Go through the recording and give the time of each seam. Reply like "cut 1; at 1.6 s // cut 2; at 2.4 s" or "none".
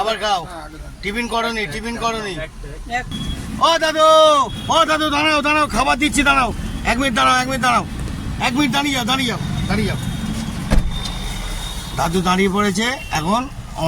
cut 1; at 3.1 s